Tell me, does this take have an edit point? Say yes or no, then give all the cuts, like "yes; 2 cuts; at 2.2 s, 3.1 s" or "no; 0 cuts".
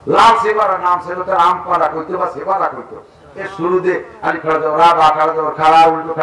no; 0 cuts